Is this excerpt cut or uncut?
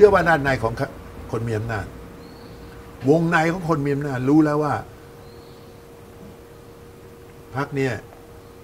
uncut